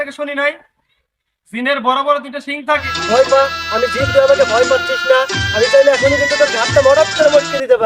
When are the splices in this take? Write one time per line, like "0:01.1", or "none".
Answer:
0:02.9